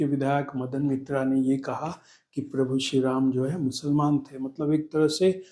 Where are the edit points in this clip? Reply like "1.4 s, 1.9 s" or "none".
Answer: none